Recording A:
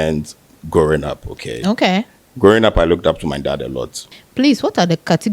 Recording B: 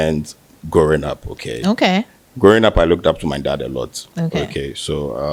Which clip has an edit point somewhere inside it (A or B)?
A